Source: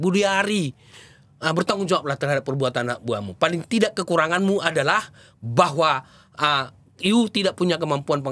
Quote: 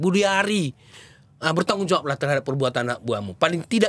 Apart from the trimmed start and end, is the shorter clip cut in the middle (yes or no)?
no